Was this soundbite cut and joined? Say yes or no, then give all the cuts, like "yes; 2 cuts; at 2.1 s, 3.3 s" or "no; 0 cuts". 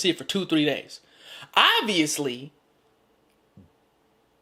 no; 0 cuts